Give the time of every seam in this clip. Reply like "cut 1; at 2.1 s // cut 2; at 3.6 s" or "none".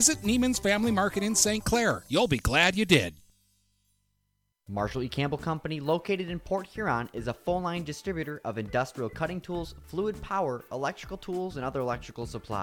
cut 1; at 4.5 s